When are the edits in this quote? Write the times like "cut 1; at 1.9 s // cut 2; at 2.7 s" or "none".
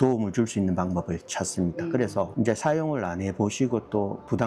none